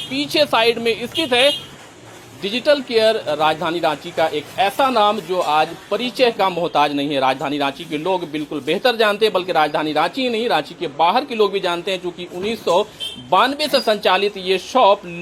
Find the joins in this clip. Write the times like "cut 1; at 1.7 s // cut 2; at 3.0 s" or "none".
none